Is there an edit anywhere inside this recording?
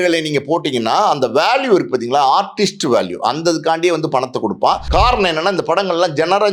yes; 1 cut; at 4.8 s

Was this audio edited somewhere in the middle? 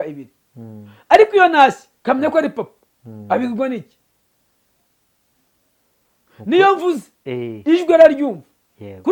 no; 0 cuts

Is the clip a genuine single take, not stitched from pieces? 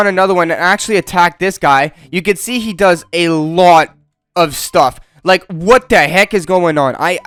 yes; 0 cuts

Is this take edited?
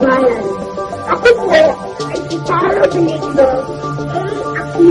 no; 0 cuts

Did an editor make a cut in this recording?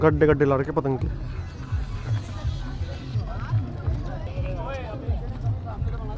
no; 0 cuts

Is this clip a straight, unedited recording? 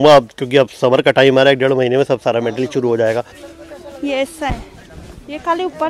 no; 1 cut; at 3.4 s

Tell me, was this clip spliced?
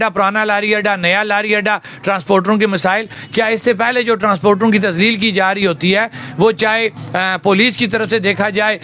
no; 0 cuts

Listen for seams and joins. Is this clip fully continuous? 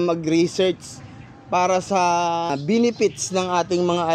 no; 1 cut; at 2.5 s

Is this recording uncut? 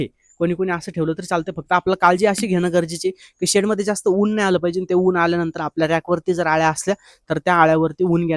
yes; 0 cuts

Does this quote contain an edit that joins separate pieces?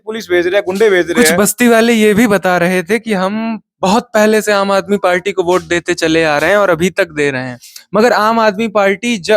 yes; 1 cut; at 1.3 s

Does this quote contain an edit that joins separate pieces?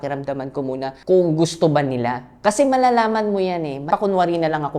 yes; 2 cuts; at 1.0 s, 3.9 s

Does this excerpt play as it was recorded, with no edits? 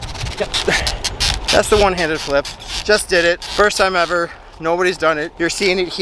no; 1 cut; at 3.5 s

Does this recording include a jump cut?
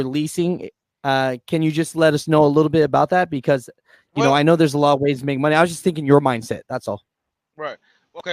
no; 0 cuts

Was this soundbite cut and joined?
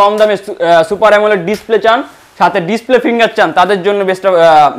no; 0 cuts

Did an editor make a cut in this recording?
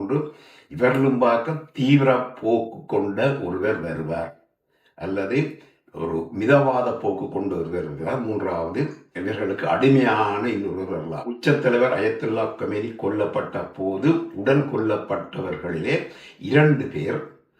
yes; 1 cut; at 11.3 s

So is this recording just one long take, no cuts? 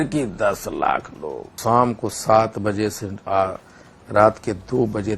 no; 1 cut; at 1.6 s

